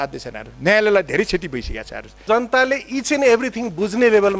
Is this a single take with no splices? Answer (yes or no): no